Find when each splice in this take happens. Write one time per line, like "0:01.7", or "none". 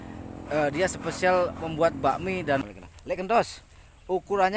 0:02.6